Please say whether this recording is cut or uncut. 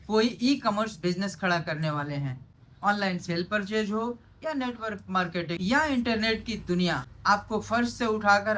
uncut